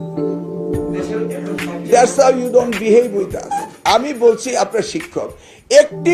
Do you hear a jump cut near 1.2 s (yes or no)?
yes